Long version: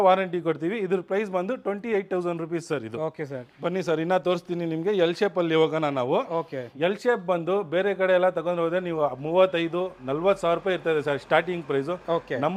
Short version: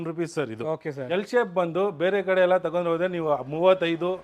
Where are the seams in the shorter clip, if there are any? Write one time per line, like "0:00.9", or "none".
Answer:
0:01.0